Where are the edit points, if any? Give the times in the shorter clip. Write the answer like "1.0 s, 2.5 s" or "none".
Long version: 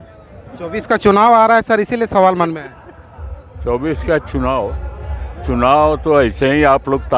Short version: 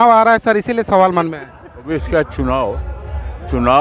1.9 s